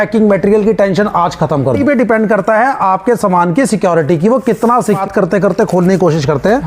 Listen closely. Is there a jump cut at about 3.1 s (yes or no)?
no